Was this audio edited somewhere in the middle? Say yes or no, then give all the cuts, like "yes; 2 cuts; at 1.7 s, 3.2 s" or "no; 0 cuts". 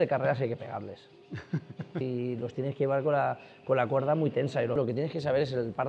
yes; 2 cuts; at 2.0 s, 4.8 s